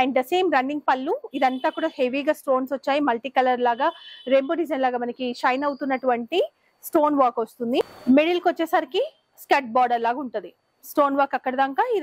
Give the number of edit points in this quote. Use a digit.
0